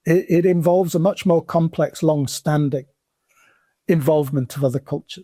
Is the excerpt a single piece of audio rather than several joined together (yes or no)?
yes